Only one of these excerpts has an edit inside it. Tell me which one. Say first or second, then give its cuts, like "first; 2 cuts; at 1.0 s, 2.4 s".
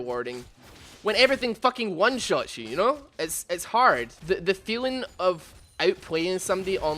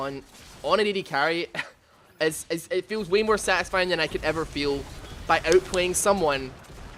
first; 1 cut; at 4.1 s